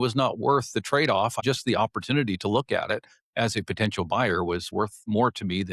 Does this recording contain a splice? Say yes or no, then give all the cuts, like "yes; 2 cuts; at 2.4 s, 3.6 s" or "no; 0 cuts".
yes; 2 cuts; at 1.4 s, 4.7 s